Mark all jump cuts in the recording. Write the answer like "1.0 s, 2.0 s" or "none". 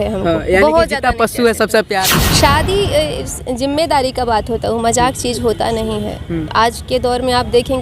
2.2 s